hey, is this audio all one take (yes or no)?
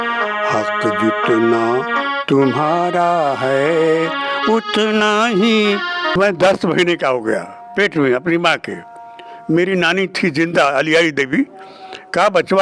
no